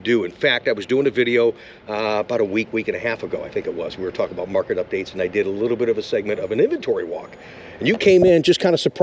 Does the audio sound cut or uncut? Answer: uncut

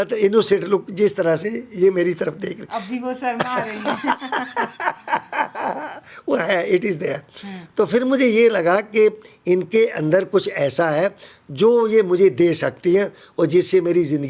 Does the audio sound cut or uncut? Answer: uncut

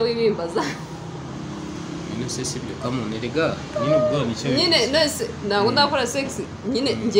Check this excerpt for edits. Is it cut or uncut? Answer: uncut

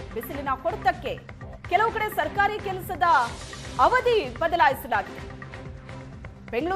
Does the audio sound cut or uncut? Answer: uncut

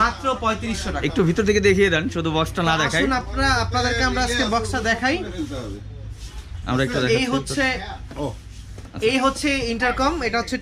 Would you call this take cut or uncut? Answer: uncut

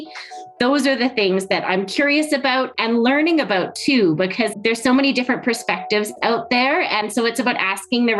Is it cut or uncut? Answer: cut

